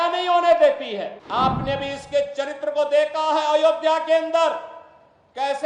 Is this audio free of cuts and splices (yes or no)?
no